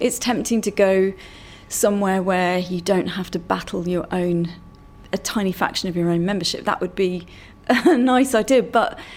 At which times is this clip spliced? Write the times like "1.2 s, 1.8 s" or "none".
none